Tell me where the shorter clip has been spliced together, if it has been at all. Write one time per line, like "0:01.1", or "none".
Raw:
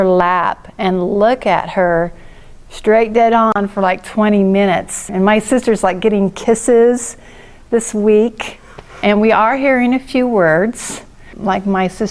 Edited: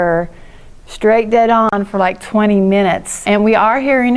0:03.1